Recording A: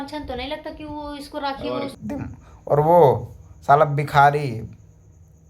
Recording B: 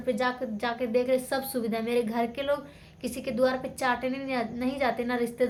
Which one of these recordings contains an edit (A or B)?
A